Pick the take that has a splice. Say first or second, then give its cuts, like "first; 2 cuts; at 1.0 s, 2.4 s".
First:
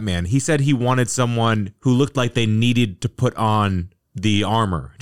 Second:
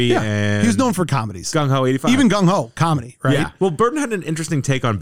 second; 1 cut; at 3.5 s